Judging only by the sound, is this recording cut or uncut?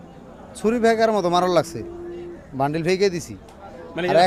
uncut